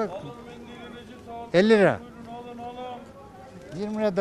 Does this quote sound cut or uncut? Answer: uncut